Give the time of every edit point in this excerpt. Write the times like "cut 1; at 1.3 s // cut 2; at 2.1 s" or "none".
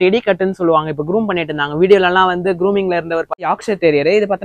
cut 1; at 3.5 s